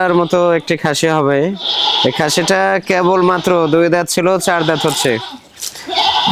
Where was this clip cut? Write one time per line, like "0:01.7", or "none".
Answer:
none